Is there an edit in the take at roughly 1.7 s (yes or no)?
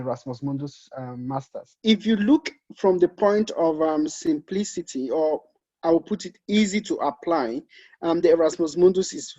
yes